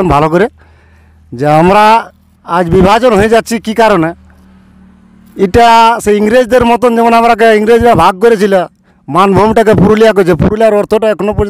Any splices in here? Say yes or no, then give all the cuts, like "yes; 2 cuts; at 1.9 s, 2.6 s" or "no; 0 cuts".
no; 0 cuts